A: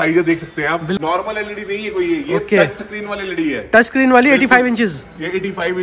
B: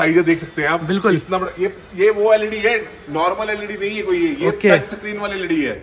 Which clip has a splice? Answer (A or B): A